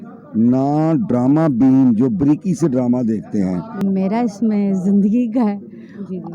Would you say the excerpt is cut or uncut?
cut